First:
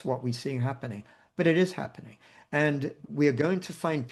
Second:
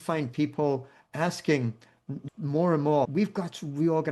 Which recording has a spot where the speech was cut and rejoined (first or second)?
second